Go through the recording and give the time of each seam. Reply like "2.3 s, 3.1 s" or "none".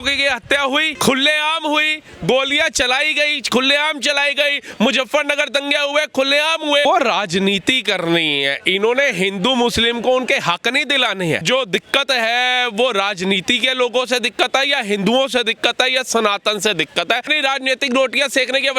0.9 s, 6.8 s, 11.4 s, 17.3 s